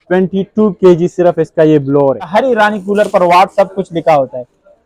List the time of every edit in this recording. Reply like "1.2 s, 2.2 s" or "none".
2.3 s